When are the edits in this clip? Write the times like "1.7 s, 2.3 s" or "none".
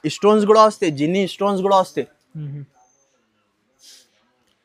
none